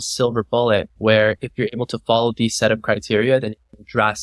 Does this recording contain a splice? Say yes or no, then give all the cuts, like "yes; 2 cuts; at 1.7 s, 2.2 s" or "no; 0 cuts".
yes; 1 cut; at 0.9 s